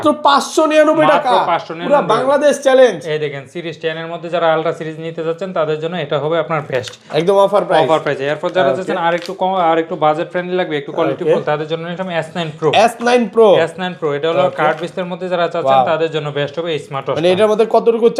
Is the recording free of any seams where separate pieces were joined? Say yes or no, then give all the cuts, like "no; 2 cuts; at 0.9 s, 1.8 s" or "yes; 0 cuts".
yes; 0 cuts